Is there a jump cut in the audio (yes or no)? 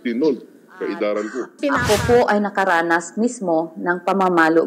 yes